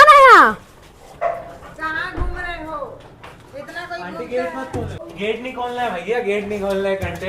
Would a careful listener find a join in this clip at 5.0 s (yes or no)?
yes